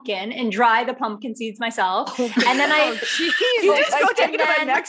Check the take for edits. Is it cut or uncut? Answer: uncut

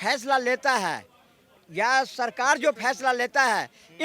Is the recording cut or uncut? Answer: uncut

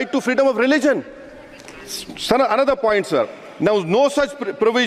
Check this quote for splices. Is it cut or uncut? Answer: uncut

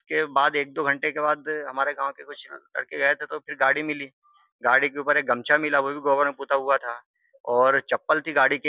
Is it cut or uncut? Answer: uncut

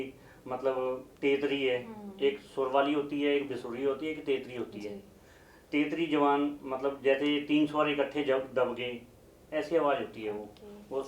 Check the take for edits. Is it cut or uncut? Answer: uncut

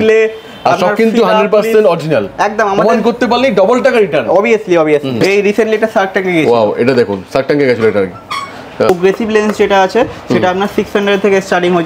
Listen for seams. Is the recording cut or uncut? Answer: cut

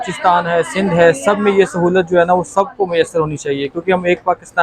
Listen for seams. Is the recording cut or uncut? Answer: uncut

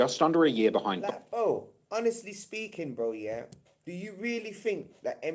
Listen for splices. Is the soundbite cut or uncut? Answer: uncut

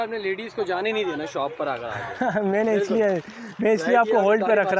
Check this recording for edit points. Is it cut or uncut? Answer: uncut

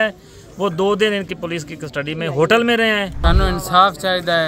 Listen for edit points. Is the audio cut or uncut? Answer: cut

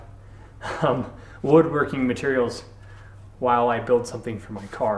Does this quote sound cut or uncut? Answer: uncut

